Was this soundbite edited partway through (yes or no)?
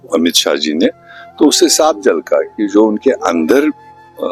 no